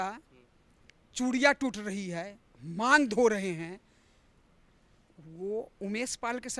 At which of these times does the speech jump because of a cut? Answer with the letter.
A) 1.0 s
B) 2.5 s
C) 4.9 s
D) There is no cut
D